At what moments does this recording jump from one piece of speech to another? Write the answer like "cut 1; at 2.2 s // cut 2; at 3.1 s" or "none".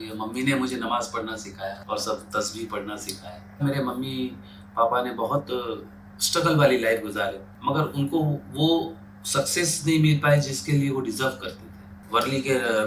cut 1; at 1.8 s // cut 2; at 3.6 s // cut 3; at 7.5 s // cut 4; at 12.0 s